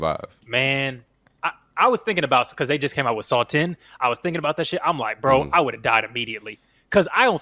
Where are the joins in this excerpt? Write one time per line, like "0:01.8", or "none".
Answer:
none